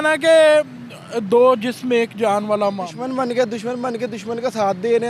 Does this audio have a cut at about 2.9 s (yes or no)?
yes